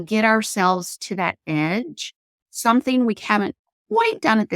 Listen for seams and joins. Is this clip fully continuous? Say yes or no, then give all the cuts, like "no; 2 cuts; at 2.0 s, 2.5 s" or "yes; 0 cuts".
no; 1 cut; at 2.3 s